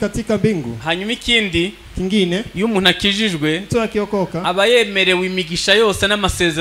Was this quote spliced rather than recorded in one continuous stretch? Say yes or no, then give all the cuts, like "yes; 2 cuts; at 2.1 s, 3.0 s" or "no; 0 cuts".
no; 0 cuts